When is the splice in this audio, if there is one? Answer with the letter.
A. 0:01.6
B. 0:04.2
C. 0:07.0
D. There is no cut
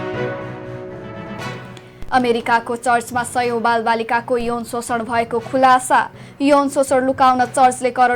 A